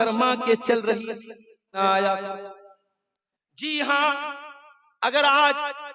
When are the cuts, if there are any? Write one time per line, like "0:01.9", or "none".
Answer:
0:01.8